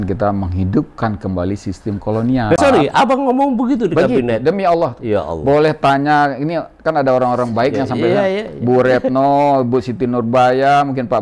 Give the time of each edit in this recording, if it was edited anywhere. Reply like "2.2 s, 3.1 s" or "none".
2.6 s